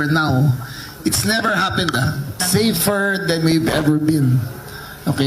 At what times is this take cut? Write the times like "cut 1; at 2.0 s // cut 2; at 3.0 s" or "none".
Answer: cut 1; at 2.4 s